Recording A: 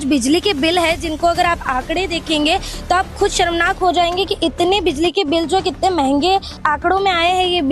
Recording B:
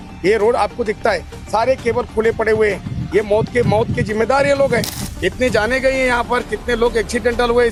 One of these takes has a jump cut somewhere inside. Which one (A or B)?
A